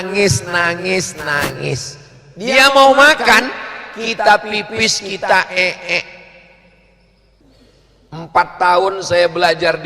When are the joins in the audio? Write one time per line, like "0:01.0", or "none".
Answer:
0:07.4